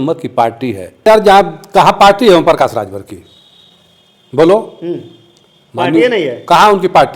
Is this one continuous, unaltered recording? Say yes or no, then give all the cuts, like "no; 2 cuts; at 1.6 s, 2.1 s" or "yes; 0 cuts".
no; 1 cut; at 1.1 s